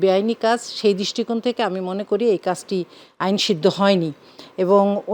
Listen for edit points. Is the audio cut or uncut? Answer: uncut